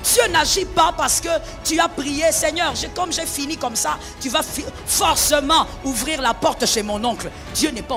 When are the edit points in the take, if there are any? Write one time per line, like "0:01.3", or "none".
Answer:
none